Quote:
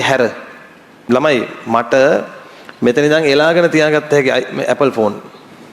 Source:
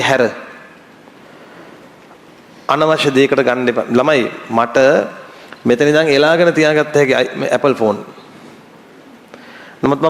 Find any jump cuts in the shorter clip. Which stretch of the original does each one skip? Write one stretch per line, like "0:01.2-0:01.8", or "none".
0:01.0-0:03.9